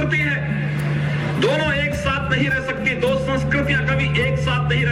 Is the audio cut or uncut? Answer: uncut